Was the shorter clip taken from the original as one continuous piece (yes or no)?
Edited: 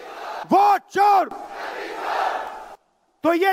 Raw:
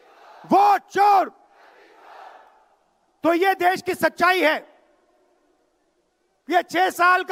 yes